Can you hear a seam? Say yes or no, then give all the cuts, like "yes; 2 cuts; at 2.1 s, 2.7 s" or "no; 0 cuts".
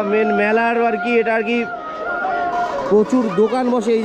no; 0 cuts